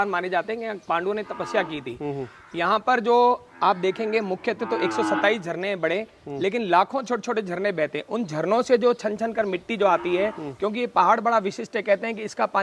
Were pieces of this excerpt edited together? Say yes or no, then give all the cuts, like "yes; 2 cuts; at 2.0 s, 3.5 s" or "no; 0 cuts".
no; 0 cuts